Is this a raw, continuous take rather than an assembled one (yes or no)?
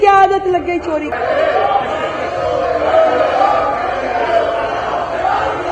no